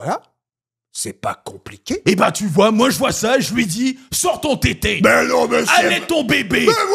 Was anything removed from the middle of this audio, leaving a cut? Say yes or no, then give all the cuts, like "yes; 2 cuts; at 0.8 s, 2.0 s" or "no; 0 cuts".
no; 0 cuts